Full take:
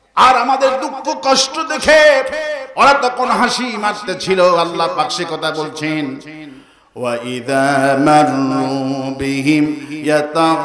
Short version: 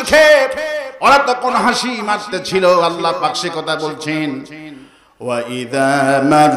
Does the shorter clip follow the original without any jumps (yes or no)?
yes